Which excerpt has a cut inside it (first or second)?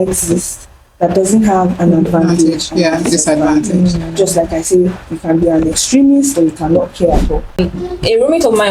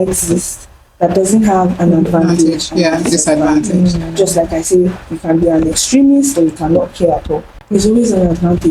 first